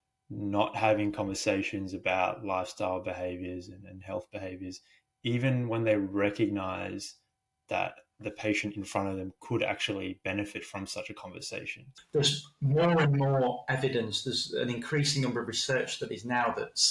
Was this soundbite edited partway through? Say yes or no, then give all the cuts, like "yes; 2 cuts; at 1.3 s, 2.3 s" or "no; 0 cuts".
yes; 1 cut; at 11.9 s